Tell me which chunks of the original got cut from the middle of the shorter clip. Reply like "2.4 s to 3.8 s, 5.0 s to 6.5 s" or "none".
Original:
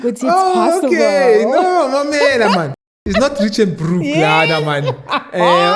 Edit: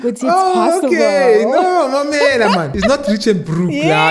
2.7 s to 3.0 s